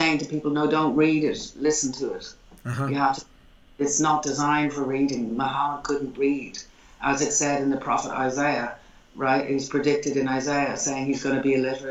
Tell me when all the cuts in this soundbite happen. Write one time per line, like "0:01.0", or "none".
none